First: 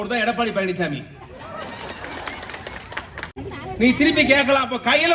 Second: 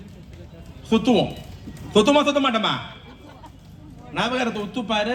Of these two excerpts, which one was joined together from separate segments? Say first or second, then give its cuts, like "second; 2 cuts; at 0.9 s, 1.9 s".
first; 1 cut; at 3.4 s